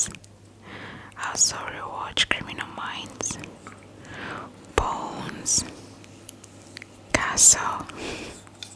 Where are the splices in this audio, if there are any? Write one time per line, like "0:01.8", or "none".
none